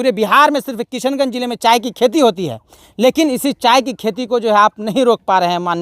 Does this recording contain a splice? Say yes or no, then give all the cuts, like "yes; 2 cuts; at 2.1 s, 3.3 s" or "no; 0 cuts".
no; 0 cuts